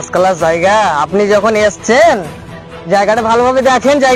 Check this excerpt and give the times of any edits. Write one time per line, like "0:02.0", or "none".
none